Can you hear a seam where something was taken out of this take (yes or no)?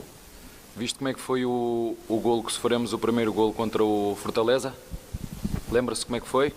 yes